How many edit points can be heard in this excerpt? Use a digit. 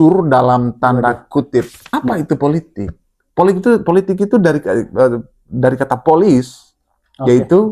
1